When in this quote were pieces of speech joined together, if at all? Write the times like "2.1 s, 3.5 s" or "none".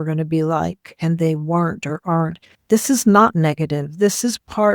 2.6 s